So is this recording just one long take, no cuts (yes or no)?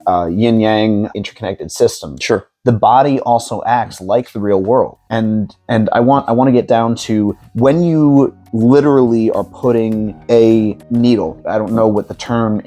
no